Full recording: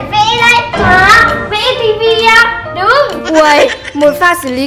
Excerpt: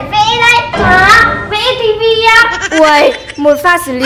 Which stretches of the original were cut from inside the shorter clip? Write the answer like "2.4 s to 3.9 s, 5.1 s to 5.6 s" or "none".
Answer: 2.6 s to 3.2 s